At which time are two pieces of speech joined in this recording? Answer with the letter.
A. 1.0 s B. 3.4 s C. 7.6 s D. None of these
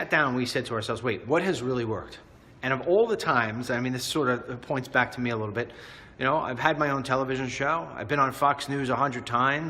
C